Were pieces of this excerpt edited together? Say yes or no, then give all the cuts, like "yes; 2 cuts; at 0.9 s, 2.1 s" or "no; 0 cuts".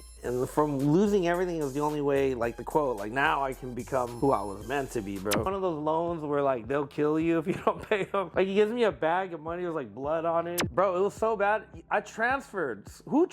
yes; 4 cuts; at 4.1 s, 5.5 s, 8.3 s, 10.6 s